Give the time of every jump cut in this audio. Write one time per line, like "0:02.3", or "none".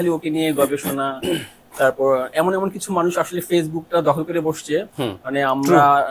none

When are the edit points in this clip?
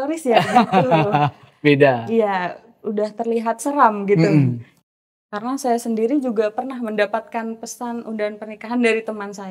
0:04.7

